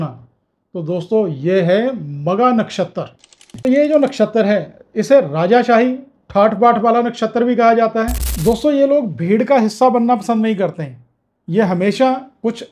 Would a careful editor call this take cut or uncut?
cut